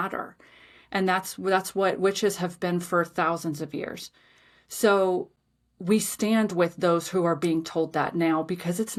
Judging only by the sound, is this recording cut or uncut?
uncut